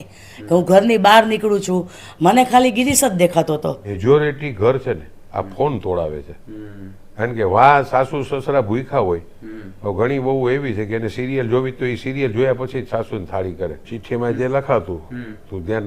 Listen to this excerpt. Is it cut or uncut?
cut